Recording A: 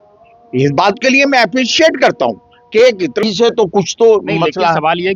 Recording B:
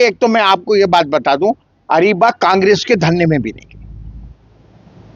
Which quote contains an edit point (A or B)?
A